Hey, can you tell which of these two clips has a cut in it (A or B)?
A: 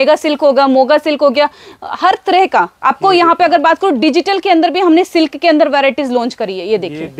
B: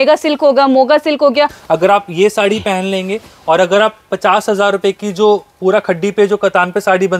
B